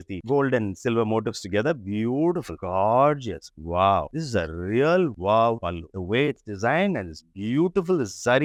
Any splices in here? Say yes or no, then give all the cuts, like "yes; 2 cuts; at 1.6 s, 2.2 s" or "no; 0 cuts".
no; 0 cuts